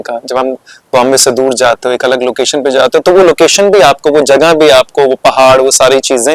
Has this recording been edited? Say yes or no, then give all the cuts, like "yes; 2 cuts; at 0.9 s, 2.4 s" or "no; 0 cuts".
no; 0 cuts